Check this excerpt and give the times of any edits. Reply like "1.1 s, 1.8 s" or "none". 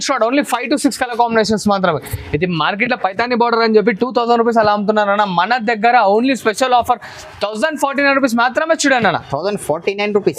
none